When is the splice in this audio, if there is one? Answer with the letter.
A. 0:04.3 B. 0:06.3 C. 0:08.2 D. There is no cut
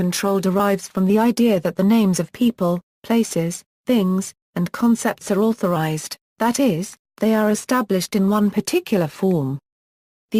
C